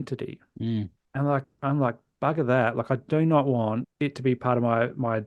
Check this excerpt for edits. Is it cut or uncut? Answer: cut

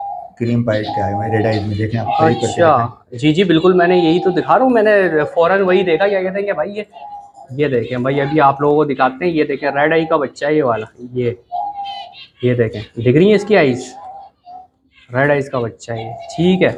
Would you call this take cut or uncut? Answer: uncut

